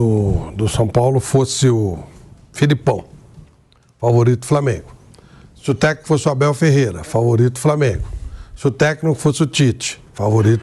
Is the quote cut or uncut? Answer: uncut